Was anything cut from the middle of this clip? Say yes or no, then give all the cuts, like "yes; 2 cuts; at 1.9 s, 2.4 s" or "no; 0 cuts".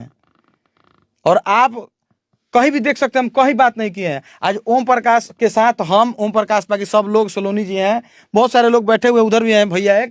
no; 0 cuts